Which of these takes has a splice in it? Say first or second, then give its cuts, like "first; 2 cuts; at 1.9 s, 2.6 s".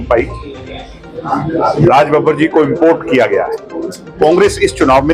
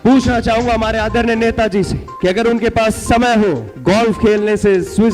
second; 2 cuts; at 2.0 s, 3.7 s